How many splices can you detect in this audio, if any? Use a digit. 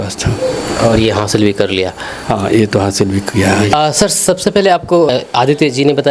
0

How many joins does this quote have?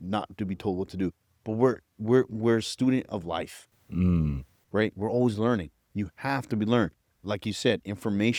0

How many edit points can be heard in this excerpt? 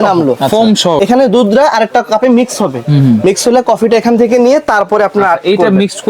1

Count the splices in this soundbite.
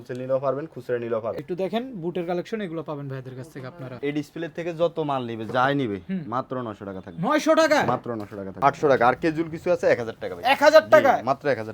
3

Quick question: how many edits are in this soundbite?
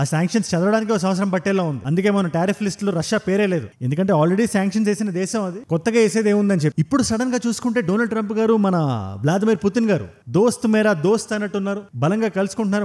0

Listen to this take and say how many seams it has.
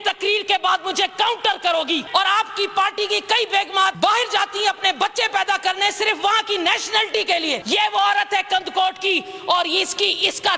3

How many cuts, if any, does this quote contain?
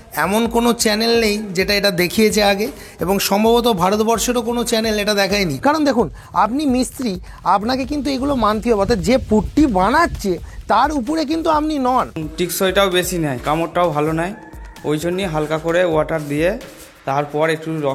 2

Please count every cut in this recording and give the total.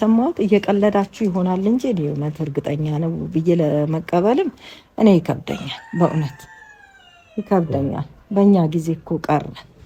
0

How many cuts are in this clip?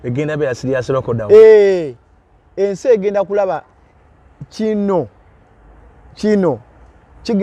0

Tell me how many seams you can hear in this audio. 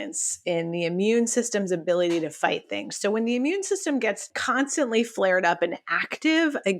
1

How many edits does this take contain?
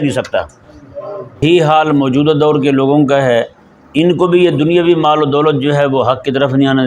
1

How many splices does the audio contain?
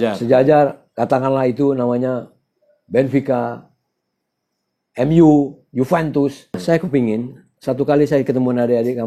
1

